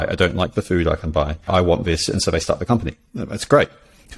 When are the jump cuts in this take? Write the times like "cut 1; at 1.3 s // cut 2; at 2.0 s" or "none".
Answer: cut 1; at 1.5 s